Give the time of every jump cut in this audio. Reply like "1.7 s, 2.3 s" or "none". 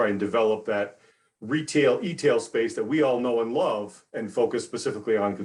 none